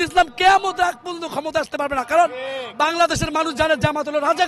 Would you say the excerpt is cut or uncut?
uncut